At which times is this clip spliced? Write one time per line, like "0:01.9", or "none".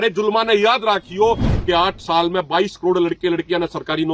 0:01.5